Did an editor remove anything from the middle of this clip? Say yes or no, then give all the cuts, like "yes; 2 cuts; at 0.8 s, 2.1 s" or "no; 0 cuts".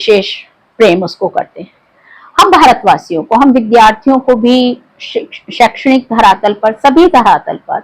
no; 0 cuts